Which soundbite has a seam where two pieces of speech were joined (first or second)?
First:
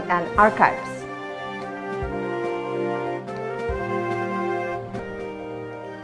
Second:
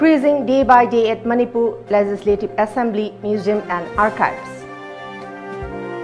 first